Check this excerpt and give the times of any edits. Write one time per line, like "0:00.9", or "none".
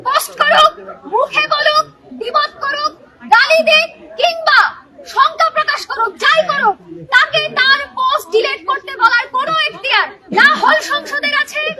none

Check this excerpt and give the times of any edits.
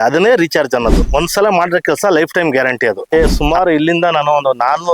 0:01.1
0:03.1

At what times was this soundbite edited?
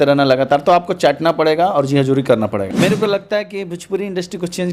0:02.7

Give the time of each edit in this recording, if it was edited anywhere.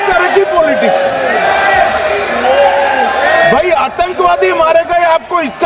none

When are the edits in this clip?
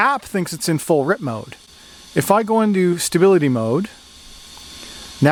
none

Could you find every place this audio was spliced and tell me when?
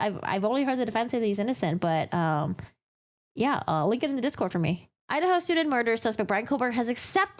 0:04.9

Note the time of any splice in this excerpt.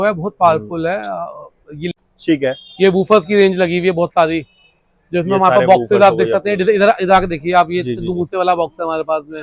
0:01.9

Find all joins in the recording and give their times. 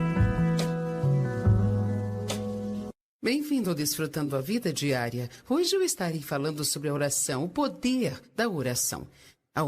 0:03.0

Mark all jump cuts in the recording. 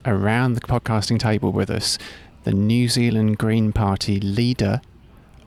none

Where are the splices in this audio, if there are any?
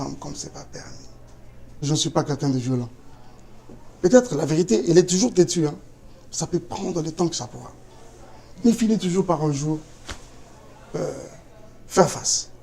0:01.8

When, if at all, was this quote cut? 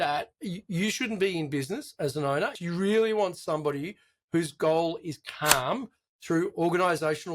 0:02.6

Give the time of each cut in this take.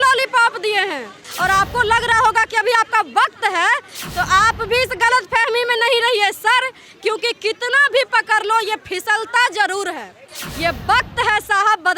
0:01.2

